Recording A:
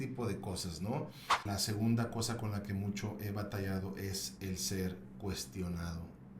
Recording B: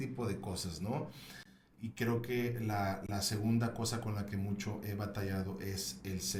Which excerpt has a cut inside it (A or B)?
A